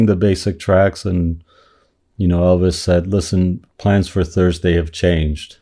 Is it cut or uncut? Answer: cut